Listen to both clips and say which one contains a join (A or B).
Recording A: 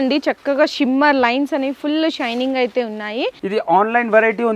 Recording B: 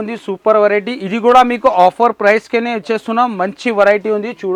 A